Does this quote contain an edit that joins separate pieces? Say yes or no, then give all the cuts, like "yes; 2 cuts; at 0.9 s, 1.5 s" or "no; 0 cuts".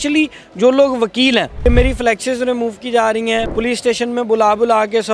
yes; 2 cuts; at 1.5 s, 3.5 s